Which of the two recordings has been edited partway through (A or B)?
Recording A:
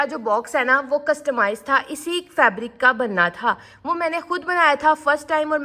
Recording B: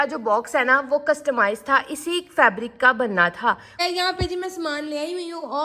B